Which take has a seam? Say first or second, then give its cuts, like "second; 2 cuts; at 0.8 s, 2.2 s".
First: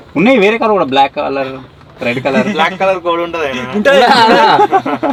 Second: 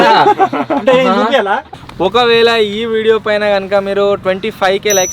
second; 1 cut; at 1.7 s